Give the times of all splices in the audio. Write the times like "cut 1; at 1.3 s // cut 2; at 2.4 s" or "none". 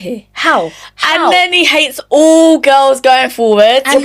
none